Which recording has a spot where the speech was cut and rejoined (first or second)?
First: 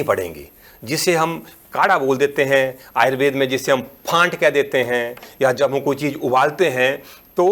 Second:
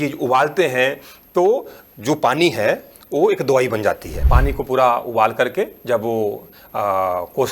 second